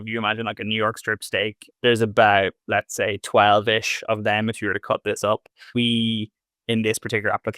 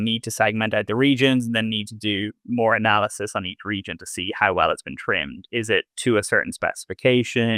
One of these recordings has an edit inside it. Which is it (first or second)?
first